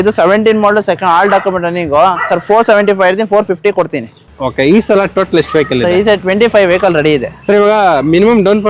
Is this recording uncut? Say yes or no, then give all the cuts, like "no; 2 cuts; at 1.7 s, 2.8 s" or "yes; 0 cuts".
no; 1 cut; at 4.3 s